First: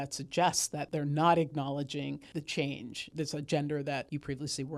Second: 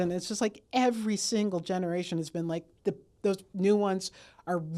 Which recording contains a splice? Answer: first; 4 cuts; at 0.8 s, 2.2 s, 3.1 s, 4.1 s

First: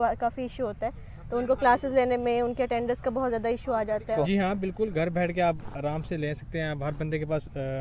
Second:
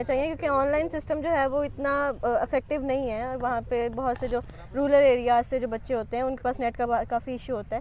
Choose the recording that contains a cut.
first; 1 cut; at 4.2 s

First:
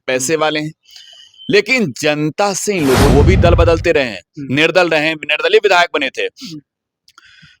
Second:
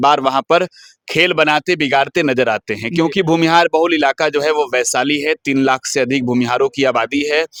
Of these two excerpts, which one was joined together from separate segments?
first; 1 cut; at 3.1 s

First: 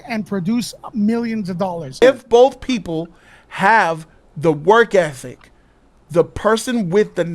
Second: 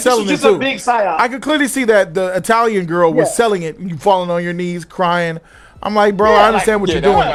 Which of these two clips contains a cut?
first; 1 cut; at 2.0 s

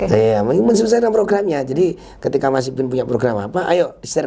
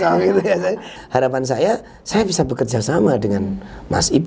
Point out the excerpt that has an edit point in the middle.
second; 1 cut; at 1.0 s

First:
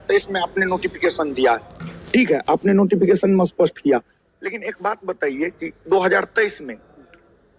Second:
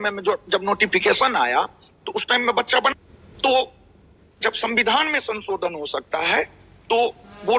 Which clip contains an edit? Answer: second; 1 cut; at 2.9 s

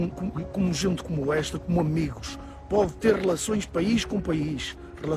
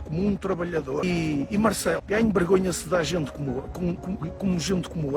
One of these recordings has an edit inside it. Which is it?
second; 2 cuts; at 1.0 s, 2.0 s

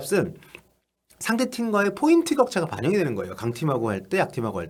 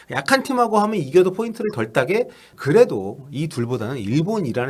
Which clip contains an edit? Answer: second; 1 cut; at 2.5 s

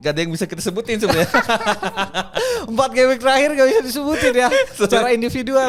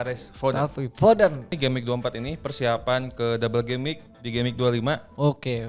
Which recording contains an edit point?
second; 1 cut; at 1.5 s

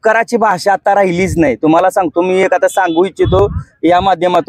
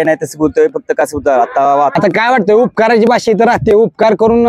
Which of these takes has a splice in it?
second; 1 cut; at 1.9 s

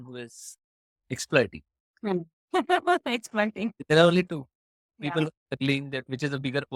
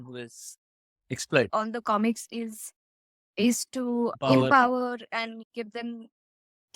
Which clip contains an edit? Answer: second; 2 cuts; at 1.5 s, 5.4 s

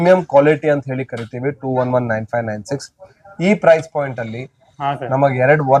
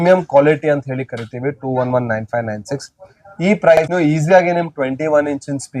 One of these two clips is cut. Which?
second; 1 cut; at 3.9 s

